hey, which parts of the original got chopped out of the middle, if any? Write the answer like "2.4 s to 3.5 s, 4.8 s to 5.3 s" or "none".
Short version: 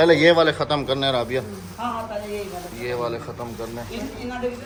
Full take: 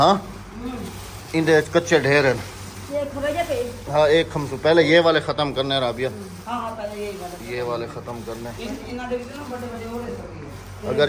none